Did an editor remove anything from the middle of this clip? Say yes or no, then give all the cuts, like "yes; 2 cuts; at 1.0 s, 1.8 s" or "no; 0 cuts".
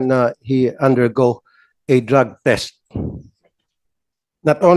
no; 0 cuts